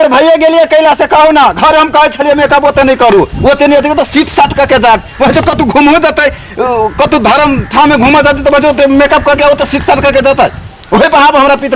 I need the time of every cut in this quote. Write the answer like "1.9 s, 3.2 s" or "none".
none